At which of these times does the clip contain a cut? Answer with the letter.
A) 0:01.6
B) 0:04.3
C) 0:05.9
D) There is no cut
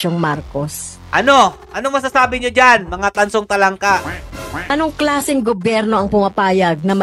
B